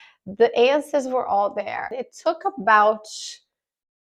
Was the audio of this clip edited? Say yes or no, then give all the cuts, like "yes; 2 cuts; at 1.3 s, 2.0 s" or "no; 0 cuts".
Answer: yes; 1 cut; at 2.1 s